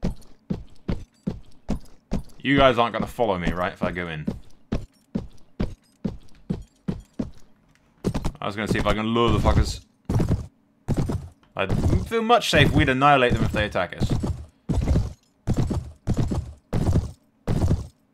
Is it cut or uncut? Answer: uncut